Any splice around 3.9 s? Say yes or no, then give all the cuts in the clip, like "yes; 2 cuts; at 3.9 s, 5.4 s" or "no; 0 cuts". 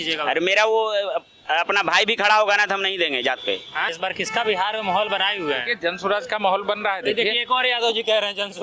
yes; 1 cut; at 3.9 s